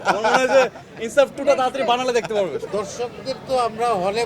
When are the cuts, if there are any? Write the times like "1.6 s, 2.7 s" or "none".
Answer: 2.6 s